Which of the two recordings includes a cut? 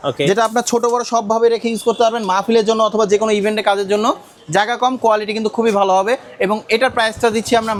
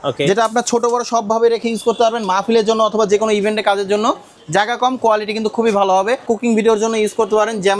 second; 1 cut; at 6.2 s

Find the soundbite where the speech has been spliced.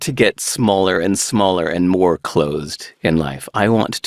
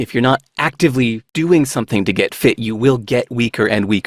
second; 1 cut; at 1.2 s

